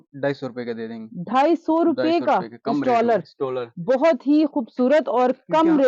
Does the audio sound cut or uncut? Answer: uncut